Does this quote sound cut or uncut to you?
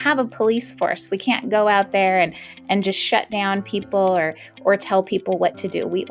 uncut